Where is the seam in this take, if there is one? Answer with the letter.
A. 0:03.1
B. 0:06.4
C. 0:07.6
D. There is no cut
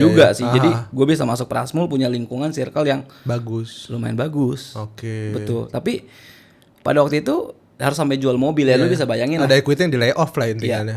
D